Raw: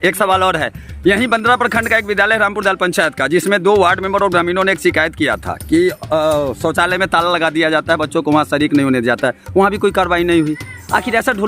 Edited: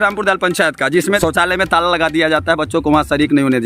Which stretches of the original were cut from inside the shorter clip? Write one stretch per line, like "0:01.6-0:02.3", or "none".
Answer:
0:03.6-0:06.6